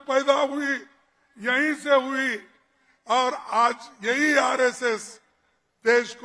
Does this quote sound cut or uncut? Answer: uncut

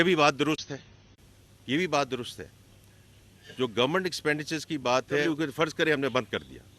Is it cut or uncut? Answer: cut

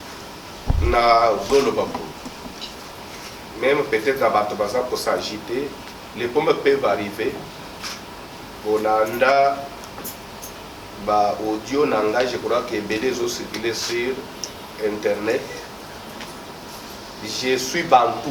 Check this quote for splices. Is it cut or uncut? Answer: uncut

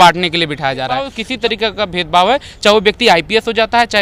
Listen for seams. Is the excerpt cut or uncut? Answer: cut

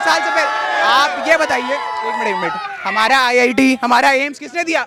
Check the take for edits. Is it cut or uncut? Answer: uncut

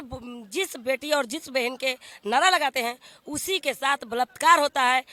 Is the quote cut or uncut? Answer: uncut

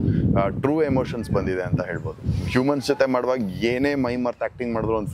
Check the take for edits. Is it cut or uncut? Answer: uncut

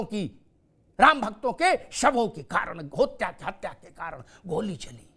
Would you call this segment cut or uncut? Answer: uncut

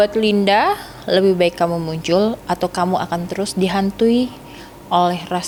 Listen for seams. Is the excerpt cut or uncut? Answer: uncut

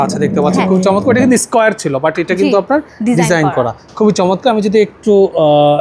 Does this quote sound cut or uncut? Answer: uncut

